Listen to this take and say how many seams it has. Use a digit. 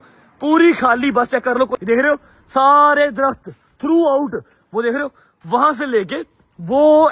1